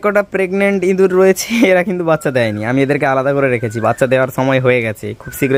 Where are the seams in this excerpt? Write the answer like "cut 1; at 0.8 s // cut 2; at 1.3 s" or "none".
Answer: none